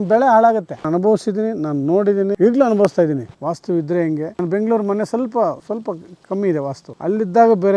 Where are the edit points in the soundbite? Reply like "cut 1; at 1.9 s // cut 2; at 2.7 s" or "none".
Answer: cut 1; at 0.9 s // cut 2; at 2.3 s // cut 3; at 3.3 s // cut 4; at 4.3 s // cut 5; at 5.6 s // cut 6; at 6.9 s